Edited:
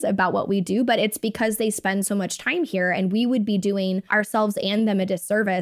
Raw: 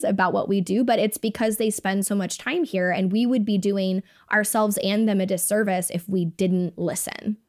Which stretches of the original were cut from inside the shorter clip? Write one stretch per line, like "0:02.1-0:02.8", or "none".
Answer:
0:04.0-0:04.2